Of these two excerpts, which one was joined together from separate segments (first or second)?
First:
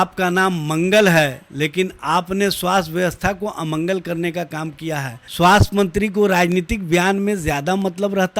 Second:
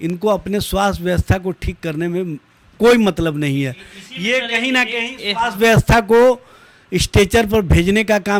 first